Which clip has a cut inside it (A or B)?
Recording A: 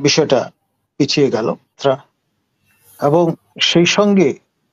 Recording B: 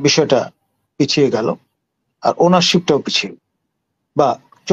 A